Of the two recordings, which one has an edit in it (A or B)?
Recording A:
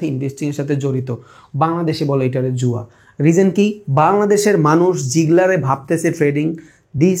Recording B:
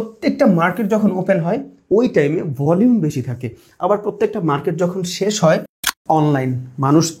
B